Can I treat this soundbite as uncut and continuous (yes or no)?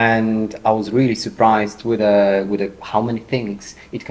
yes